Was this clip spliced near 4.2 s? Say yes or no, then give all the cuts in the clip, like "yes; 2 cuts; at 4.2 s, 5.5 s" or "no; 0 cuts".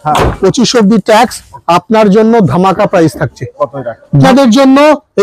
yes; 1 cut; at 4.2 s